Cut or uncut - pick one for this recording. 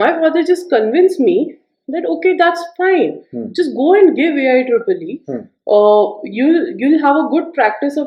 uncut